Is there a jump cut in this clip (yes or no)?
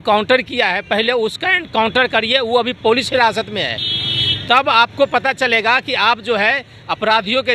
no